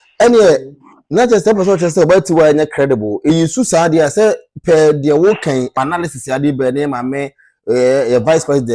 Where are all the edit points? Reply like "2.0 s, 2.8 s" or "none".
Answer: 3.3 s, 5.7 s